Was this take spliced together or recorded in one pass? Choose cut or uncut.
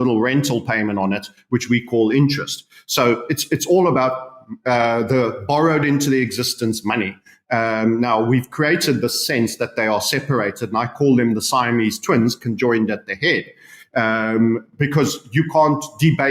uncut